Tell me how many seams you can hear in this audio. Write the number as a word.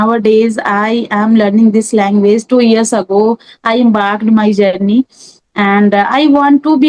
zero